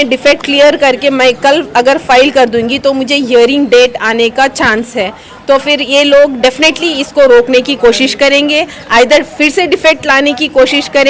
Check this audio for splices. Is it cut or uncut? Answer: uncut